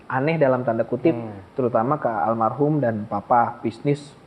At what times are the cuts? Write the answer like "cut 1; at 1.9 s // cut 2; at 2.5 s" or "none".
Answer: none

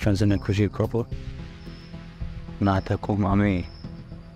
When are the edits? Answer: none

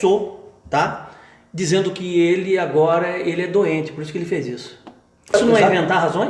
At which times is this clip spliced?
cut 1; at 5.3 s

